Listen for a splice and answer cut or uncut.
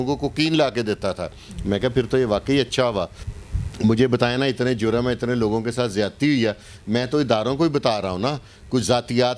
cut